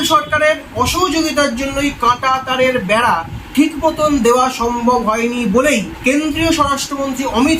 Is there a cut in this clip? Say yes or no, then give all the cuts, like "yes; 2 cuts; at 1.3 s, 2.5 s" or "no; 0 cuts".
no; 0 cuts